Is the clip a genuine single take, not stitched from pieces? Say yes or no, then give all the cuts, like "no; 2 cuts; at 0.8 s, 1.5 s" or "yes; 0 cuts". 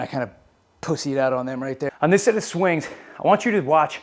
no; 1 cut; at 1.9 s